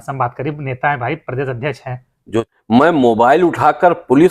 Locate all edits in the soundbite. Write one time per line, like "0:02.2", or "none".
0:02.4